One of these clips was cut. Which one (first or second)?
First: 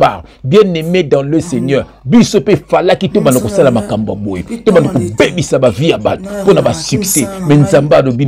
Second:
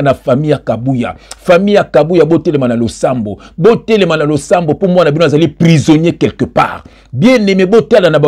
second